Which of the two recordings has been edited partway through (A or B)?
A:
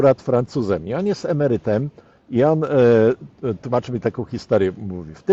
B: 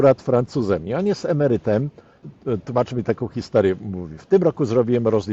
B